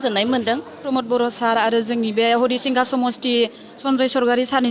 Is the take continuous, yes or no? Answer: no